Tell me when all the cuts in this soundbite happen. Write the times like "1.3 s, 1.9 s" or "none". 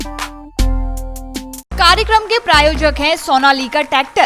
1.7 s